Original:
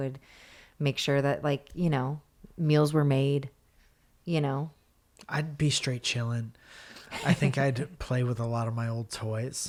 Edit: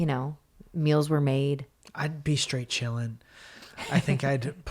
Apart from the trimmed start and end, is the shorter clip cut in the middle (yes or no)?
yes